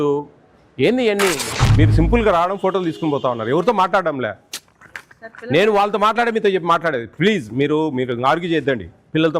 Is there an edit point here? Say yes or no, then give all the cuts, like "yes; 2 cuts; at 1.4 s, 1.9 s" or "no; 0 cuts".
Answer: yes; 1 cut; at 1.7 s